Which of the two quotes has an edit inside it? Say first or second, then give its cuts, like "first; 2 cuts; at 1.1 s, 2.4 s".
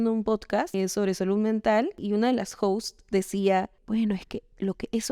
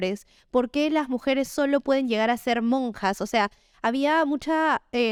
first; 3 cuts; at 0.7 s, 2.0 s, 3.8 s